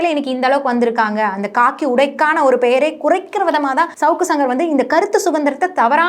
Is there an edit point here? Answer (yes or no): yes